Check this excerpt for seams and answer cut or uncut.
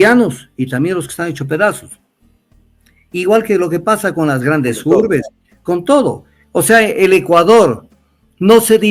uncut